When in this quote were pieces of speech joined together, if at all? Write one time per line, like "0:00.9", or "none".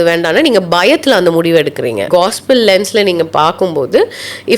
0:02.0